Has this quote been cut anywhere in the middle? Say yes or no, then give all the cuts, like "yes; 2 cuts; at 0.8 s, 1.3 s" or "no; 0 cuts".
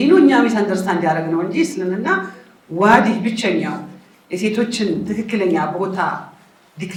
no; 0 cuts